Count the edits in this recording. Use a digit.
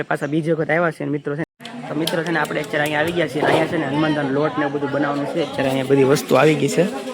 1